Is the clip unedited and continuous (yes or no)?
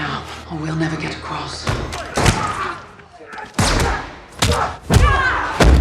no